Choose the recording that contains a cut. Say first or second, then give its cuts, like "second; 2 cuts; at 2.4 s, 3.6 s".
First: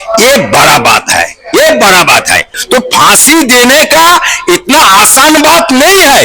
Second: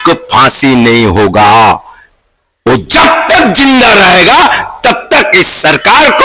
first; 1 cut; at 2.5 s